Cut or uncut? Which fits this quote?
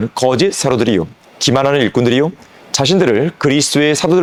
uncut